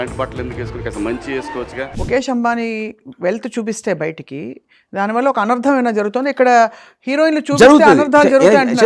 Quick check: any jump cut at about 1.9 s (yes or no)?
yes